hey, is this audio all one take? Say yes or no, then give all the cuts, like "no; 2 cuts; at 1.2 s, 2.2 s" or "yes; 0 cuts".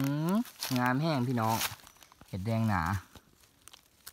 yes; 0 cuts